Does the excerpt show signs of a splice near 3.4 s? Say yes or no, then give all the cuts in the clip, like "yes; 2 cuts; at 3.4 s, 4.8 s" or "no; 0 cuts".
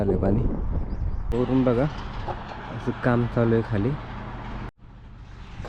no; 2 cuts; at 1.3 s, 4.7 s